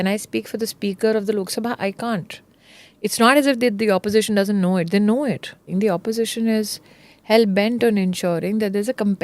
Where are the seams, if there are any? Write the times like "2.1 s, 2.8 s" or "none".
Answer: 5.7 s